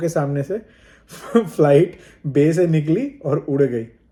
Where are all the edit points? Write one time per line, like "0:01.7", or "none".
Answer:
none